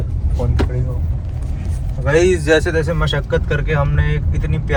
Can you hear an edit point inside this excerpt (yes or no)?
no